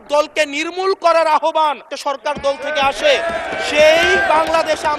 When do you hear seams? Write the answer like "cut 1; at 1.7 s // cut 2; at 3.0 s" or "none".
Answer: cut 1; at 1.9 s